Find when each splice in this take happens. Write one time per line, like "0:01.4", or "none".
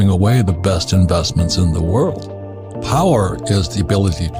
0:02.7

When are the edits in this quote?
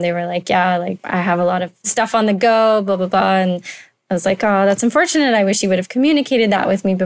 0:01.0
0:01.9

